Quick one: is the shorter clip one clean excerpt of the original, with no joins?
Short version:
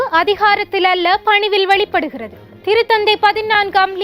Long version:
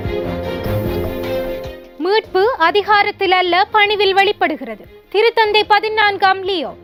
yes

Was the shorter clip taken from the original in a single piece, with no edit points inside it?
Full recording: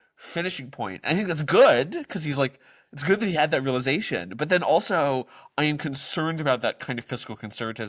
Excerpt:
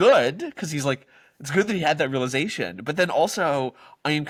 yes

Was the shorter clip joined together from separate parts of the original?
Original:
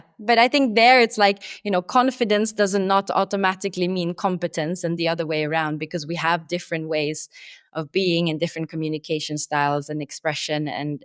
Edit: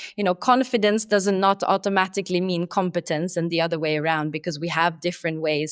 no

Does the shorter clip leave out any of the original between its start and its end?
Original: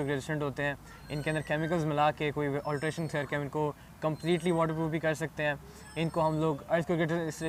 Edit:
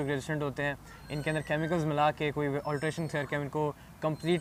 no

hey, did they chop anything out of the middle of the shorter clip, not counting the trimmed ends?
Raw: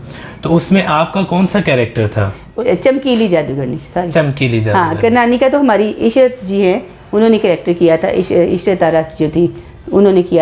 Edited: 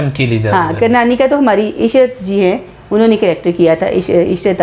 no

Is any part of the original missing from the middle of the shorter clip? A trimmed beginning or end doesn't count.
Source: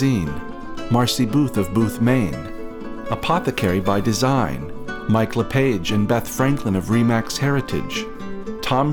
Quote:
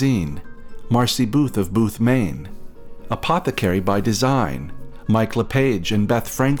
no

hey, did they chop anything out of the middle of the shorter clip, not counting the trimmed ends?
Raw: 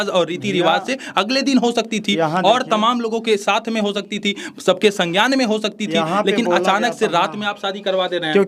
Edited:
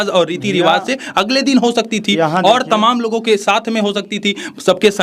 no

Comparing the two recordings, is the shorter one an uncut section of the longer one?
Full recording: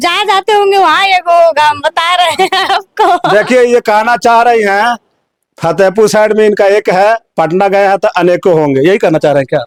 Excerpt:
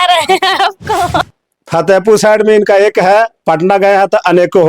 no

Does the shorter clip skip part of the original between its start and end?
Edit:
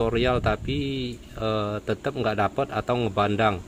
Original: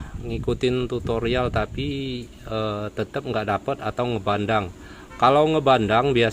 no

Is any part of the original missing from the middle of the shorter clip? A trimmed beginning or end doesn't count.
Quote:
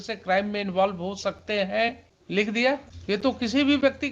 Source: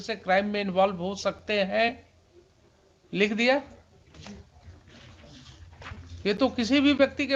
yes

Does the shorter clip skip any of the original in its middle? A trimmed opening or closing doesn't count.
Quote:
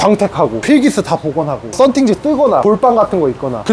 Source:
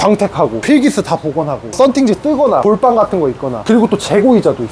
no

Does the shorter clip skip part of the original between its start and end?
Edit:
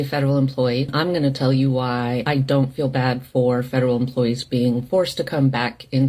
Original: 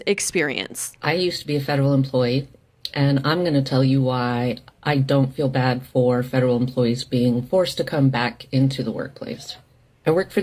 yes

